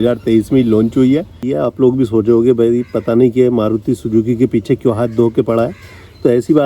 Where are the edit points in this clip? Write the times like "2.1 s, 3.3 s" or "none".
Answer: 1.4 s

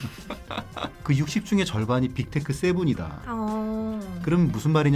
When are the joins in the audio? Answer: 1.0 s

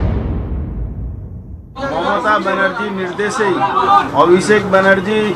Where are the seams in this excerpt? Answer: 1.2 s

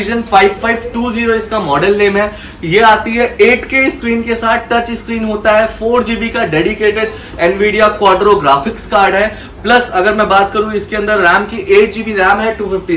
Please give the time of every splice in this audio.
none

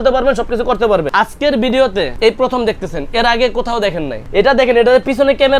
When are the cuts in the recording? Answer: 1.1 s, 2.1 s, 4.1 s

